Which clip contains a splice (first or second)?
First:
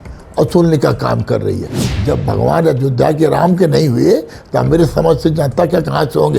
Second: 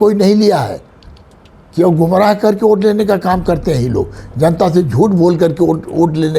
first